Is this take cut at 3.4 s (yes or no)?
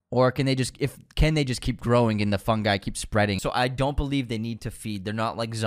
yes